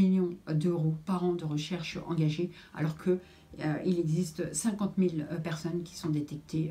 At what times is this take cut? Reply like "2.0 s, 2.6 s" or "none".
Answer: none